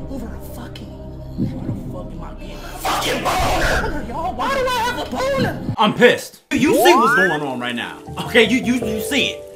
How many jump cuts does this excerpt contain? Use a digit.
2